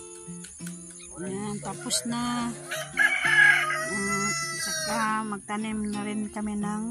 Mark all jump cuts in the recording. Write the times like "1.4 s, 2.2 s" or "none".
none